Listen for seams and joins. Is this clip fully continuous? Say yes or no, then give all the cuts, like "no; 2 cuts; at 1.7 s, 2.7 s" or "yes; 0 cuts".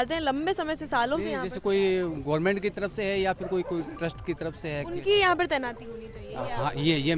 yes; 0 cuts